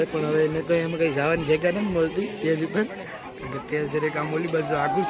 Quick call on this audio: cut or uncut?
uncut